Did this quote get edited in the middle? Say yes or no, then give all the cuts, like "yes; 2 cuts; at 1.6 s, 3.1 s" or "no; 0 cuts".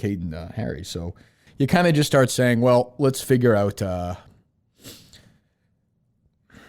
yes; 1 cut; at 1.4 s